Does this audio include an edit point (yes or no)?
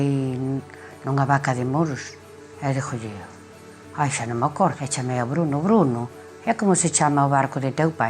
yes